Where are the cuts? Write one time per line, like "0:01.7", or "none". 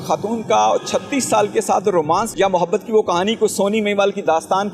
0:02.3